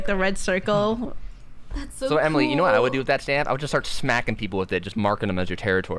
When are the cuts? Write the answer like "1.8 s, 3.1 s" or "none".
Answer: 1.7 s